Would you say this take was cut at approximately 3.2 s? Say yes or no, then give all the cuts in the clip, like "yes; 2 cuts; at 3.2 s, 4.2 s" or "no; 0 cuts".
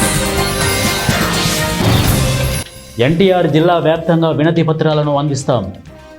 no; 1 cut; at 1.3 s